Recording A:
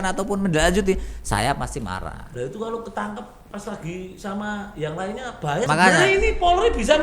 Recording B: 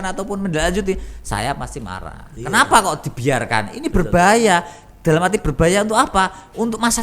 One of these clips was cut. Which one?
A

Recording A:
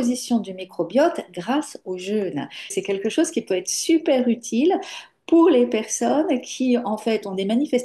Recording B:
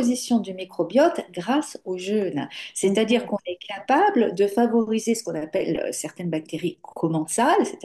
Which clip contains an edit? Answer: A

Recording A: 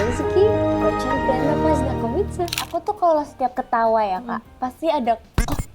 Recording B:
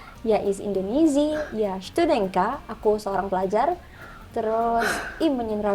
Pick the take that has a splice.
A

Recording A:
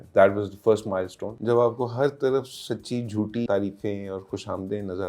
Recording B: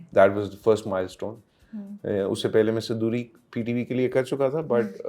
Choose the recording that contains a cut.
A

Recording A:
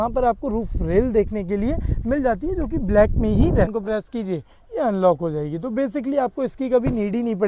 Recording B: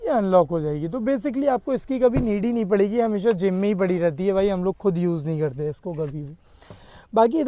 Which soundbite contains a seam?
A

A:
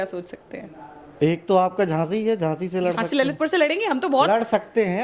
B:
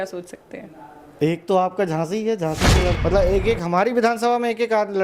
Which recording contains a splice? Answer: B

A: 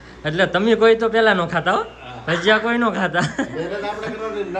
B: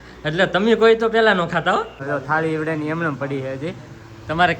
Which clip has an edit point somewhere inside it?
B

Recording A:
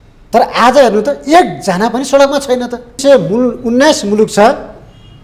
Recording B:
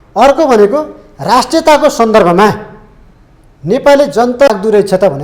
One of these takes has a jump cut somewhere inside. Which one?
A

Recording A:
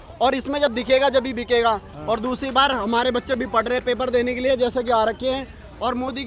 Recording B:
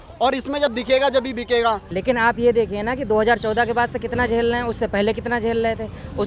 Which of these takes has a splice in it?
B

